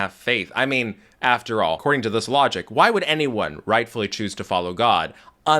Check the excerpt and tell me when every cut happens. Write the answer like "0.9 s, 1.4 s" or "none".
1.8 s